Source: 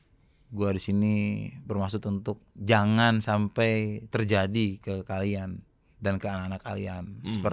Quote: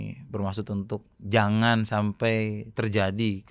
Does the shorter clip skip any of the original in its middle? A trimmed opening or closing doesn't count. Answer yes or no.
no